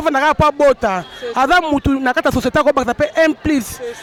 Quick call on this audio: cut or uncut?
uncut